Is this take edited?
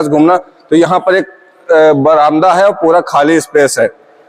no; 0 cuts

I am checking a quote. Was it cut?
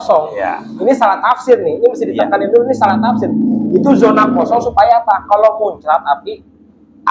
no; 0 cuts

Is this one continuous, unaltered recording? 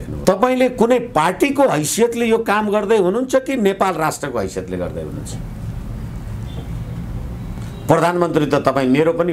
yes; 0 cuts

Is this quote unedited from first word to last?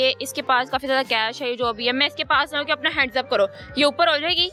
yes; 0 cuts

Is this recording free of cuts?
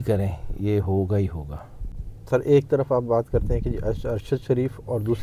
yes; 0 cuts

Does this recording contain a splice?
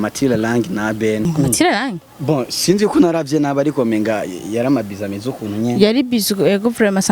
yes; 1 cut; at 1.3 s

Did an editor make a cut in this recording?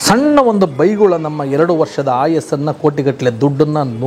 no; 0 cuts

